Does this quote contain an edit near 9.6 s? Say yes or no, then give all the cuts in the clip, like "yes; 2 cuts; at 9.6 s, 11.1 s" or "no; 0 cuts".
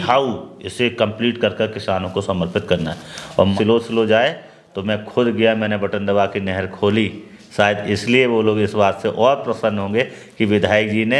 no; 1 cut; at 3.5 s